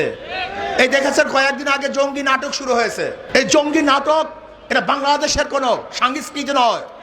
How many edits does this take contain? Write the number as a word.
one